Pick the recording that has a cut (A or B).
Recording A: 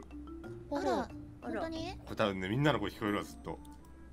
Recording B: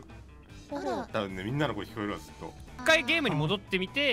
B